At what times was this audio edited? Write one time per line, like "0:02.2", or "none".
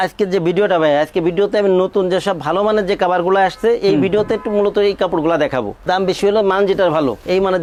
none